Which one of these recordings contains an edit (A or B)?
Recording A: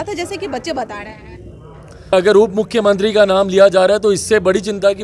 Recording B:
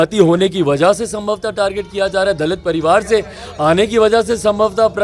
A